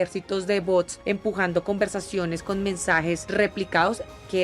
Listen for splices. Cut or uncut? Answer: cut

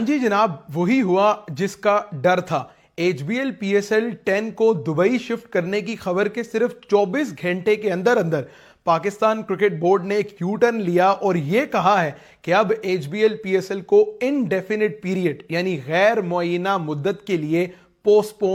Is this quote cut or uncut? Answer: uncut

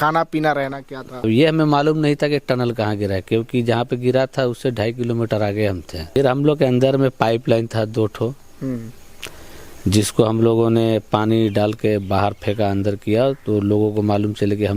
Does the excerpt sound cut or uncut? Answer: cut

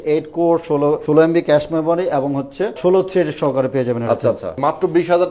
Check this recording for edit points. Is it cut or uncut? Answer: cut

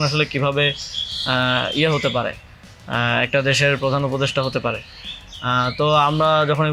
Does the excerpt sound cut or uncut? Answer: uncut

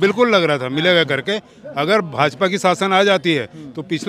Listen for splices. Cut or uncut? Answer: uncut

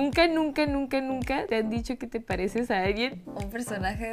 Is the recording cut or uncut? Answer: uncut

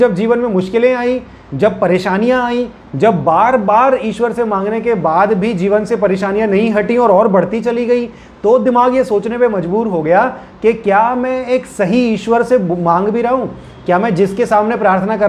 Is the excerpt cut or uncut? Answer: uncut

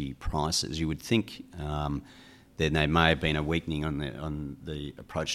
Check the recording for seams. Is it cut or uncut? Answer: uncut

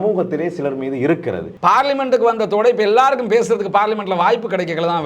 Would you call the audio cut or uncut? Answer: cut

